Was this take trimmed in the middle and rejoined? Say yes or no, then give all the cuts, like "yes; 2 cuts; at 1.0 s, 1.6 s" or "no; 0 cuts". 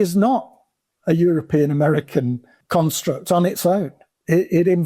yes; 1 cut; at 2.5 s